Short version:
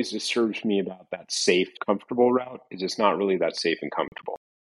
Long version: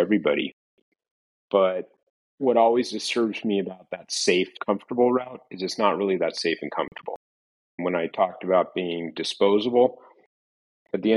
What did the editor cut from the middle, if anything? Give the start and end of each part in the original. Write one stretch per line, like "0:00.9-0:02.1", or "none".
none